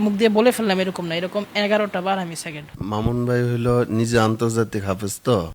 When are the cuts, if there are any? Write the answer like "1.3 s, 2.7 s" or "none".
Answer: 2.7 s

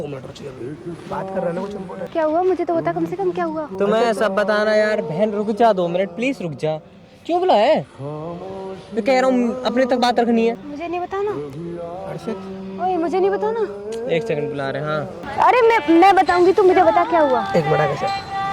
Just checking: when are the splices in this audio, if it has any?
15.2 s

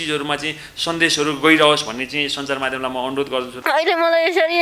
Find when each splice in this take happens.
3.5 s

